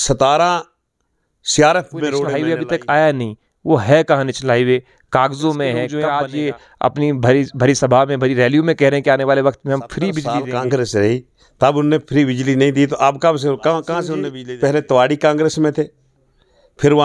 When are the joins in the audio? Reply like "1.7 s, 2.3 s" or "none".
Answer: 2.3 s, 5.9 s, 10.3 s, 14.3 s